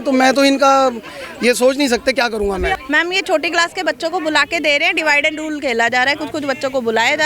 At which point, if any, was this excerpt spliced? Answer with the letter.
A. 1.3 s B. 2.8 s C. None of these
B